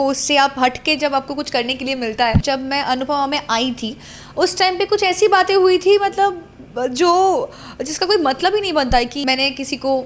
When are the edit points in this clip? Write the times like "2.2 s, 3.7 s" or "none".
2.4 s, 9.2 s